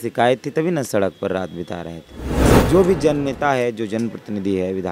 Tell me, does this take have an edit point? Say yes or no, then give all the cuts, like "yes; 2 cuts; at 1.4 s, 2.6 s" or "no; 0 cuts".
yes; 1 cut; at 2.5 s